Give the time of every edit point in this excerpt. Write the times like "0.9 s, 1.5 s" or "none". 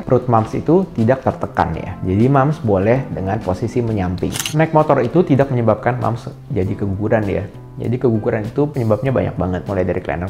4.4 s